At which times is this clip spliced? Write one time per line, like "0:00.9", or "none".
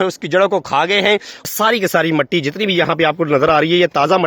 0:01.5

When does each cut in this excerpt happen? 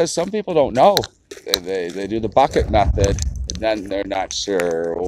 0:01.3

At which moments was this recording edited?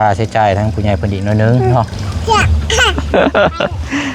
0:02.1

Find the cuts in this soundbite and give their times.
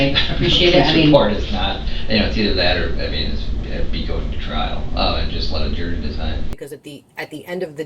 0:06.4

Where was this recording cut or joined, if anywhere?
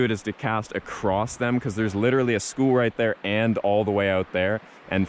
none

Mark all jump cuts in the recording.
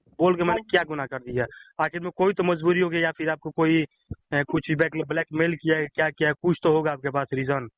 none

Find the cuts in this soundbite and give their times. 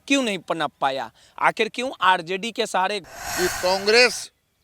0:03.0

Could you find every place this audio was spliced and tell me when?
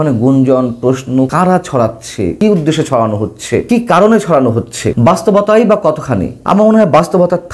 0:01.3
0:02.4
0:03.6
0:04.8
0:06.3

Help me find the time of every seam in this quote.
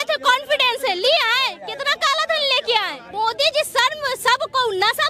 0:03.0

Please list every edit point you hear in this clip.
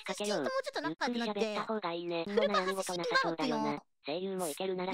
none

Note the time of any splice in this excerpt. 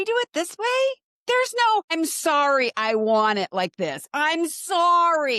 0:01.1
0:01.9

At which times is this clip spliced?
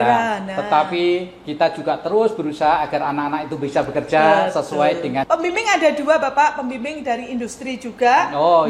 0:05.2

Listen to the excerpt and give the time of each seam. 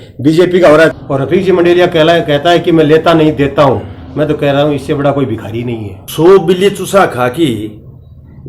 0:01.0
0:05.9

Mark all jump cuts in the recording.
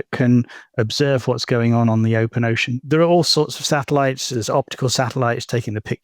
0:02.7
0:04.3

